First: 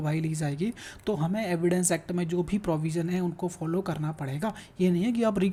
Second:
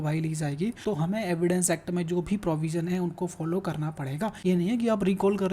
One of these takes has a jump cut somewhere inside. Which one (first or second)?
second